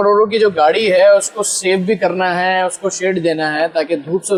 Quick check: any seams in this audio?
no; 0 cuts

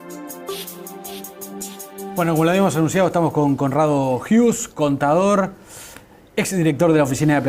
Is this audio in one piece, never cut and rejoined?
yes; 0 cuts

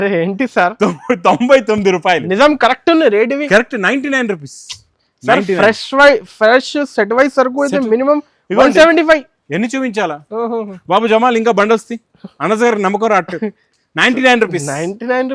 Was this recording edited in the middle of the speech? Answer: no; 0 cuts

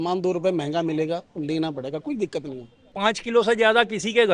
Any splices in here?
yes; 1 cut; at 2.8 s

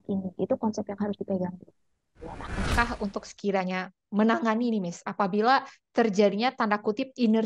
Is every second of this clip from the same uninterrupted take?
no; 1 cut; at 2.7 s

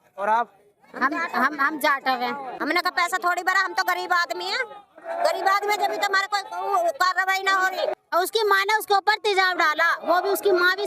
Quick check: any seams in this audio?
yes; 2 cuts; at 2.5 s, 7.9 s

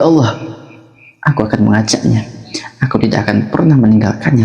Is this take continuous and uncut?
yes; 0 cuts

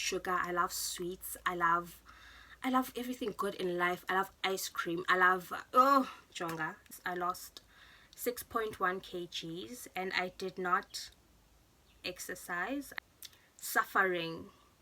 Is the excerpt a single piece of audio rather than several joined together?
no; 2 cuts; at 6.8 s, 12.9 s

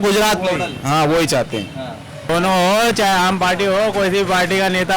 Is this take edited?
yes; 1 cut; at 2.2 s

